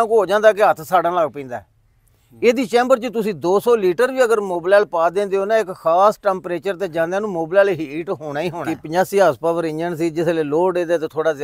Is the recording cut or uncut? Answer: cut